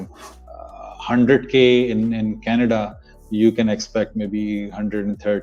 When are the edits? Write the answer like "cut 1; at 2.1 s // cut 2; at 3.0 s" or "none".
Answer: none

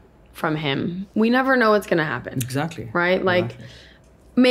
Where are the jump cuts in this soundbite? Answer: cut 1; at 1.0 s

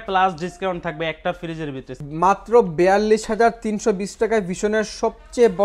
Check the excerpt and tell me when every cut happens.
cut 1; at 1.9 s

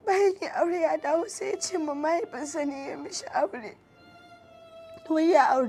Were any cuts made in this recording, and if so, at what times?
none

